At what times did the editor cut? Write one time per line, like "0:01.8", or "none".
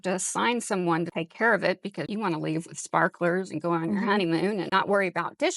0:01.1
0:02.1
0:04.7